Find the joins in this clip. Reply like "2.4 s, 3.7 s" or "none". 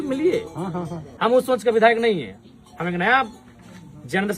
1.0 s